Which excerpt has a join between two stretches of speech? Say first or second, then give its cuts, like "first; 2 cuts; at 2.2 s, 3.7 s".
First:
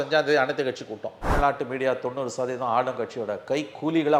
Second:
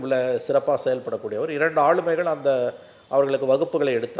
first; 1 cut; at 1.3 s